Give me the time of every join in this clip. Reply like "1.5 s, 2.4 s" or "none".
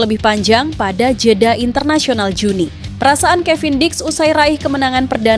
2.8 s